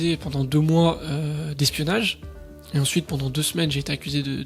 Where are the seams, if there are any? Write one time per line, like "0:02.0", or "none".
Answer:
none